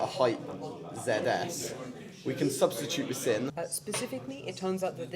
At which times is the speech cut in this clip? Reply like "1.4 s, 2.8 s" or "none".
3.5 s